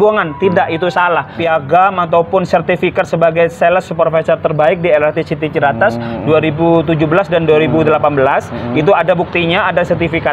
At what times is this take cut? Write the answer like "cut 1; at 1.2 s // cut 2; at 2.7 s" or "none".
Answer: cut 1; at 1.3 s